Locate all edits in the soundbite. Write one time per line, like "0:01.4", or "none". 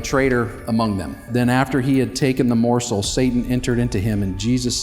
0:01.2